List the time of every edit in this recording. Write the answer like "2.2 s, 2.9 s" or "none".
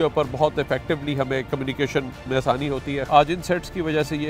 3.1 s